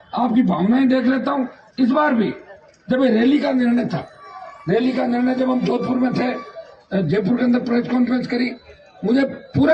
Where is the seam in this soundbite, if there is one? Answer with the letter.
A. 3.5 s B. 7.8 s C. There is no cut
C